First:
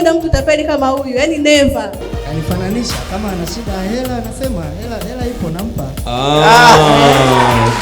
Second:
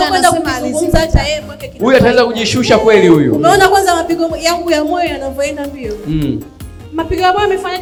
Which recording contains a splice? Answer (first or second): first